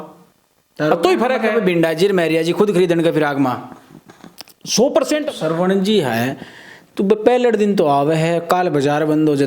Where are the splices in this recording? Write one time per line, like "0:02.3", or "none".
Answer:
0:05.3